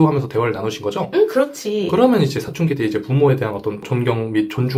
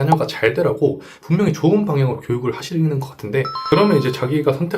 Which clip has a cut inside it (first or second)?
second